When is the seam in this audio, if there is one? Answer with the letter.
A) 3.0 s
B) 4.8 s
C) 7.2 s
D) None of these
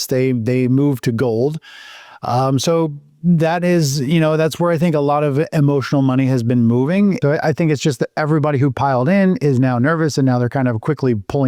C